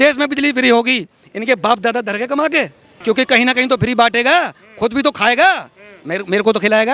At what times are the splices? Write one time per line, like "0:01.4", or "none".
0:02.9